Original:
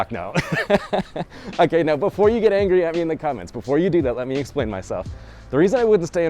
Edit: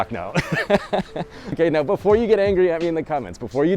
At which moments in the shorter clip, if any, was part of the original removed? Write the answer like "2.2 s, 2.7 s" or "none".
1.6 s